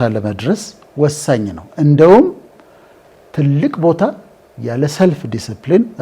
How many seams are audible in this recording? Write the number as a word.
zero